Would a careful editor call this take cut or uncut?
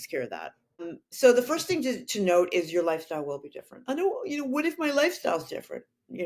cut